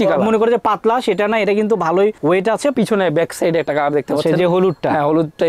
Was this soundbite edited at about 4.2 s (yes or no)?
no